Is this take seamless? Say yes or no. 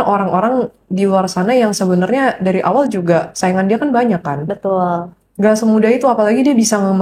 yes